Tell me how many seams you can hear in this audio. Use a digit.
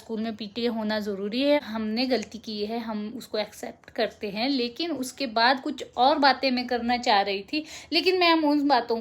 1